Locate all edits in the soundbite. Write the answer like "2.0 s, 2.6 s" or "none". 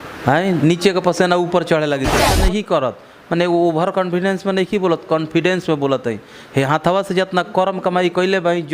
2.3 s